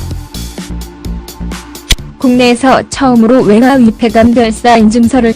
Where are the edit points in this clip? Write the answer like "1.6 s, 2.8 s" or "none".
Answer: 3.8 s

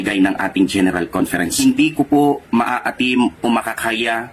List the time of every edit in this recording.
1.5 s

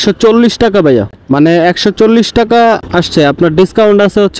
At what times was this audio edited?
1.2 s, 2.8 s

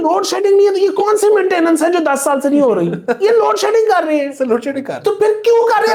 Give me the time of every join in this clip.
none

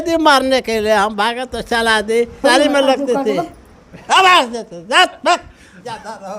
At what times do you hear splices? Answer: 2.4 s

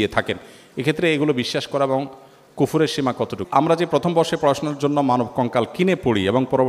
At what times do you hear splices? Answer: 3.4 s

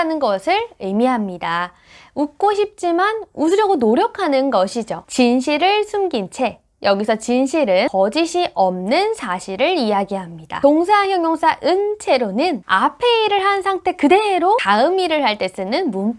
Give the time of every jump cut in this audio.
14.6 s

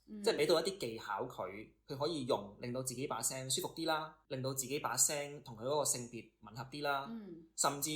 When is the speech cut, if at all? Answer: 4.2 s

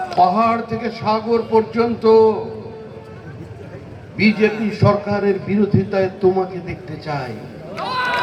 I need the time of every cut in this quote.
none

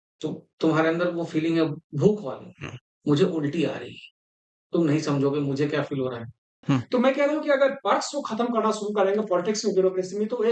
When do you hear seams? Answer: 6.6 s

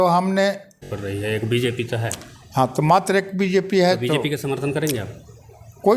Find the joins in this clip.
0.9 s

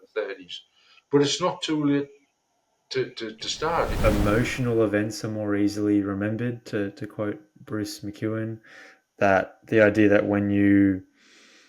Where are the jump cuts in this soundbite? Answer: 3.9 s

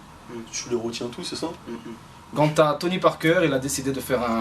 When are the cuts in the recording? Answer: 2.3 s

